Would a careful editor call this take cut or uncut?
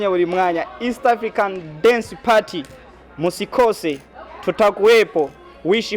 uncut